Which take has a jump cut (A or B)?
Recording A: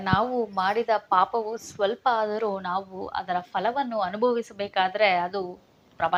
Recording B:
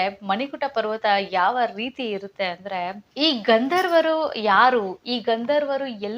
B